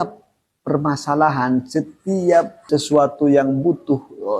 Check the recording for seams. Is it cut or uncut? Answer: cut